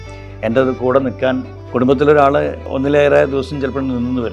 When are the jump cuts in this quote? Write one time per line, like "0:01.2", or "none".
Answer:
0:01.5
0:02.6